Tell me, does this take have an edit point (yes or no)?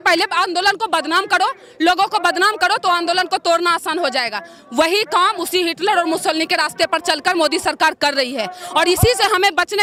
no